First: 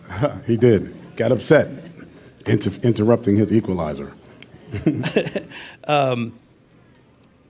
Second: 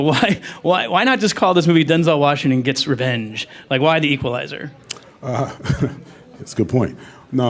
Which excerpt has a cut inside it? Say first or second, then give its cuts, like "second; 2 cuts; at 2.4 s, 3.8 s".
second; 1 cut; at 2.2 s